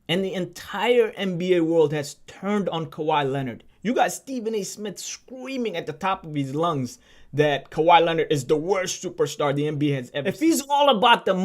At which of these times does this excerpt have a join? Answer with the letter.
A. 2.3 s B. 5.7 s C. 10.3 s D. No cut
C